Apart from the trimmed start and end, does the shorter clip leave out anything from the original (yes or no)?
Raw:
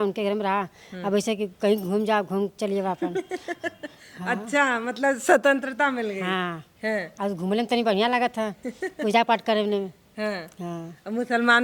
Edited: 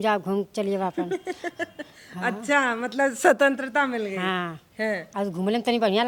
no